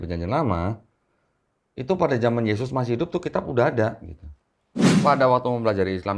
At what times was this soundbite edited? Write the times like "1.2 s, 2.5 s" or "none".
4.6 s

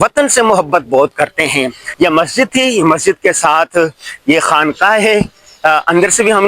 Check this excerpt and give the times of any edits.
1.8 s

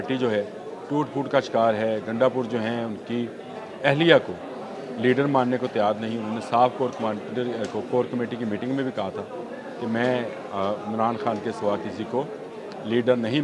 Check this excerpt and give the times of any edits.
none

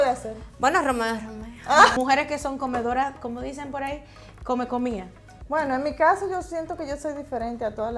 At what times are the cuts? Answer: 2.0 s

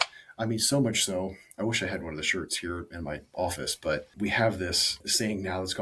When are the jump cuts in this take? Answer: 4.1 s, 5.0 s

